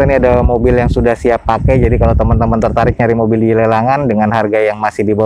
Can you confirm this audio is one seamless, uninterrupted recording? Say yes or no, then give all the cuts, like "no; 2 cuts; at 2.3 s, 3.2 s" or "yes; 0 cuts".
yes; 0 cuts